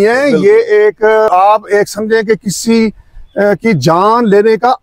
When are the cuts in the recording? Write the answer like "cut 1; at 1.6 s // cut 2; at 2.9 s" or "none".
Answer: cut 1; at 1.3 s